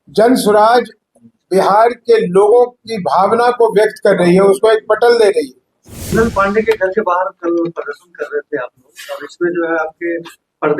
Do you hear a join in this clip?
yes; 1 cut; at 6.1 s

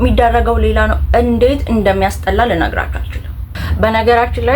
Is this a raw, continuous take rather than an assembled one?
no; 1 cut; at 3.6 s

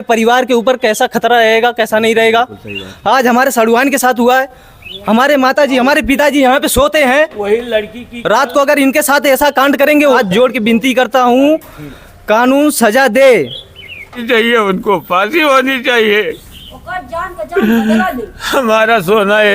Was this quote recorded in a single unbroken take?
no; 2 cuts; at 10.2 s, 14.2 s

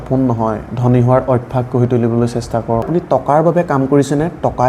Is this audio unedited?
no; 1 cut; at 2.9 s

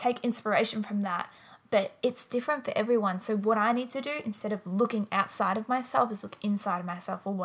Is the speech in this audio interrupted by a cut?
no; 0 cuts

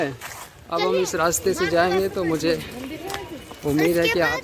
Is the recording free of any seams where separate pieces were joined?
yes; 0 cuts

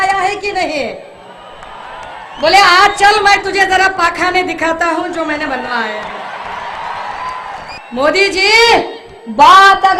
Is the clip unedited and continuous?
no; 1 cut; at 7.8 s

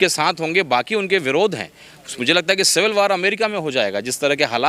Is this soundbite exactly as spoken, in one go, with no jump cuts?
yes; 0 cuts

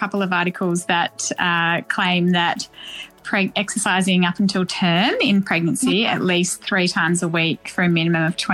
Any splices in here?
no; 0 cuts

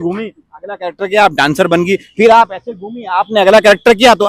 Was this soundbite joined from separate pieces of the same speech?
no; 0 cuts

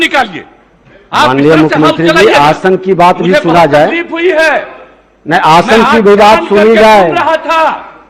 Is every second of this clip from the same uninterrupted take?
yes; 0 cuts

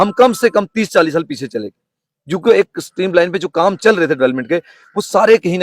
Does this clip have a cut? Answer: no; 0 cuts

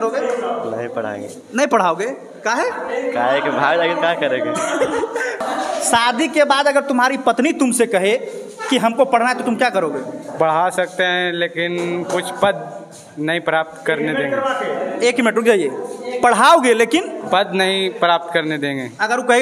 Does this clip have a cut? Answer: yes; 1 cut; at 5.4 s

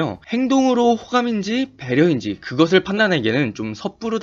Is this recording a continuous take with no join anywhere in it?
yes; 0 cuts

